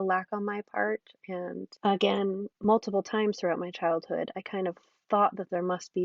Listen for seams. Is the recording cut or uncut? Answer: cut